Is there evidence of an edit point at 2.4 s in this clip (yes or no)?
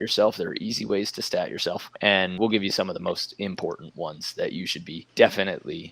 yes